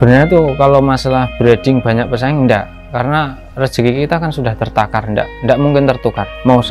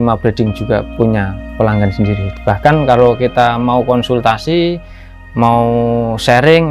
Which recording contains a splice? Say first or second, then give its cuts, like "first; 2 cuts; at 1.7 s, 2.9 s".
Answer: second; 2 cuts; at 1.0 s, 2.2 s